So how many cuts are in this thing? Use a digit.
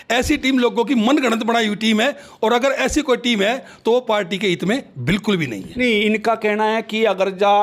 0